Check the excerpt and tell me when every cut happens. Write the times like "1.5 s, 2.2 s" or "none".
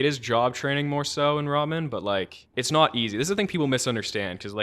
2.4 s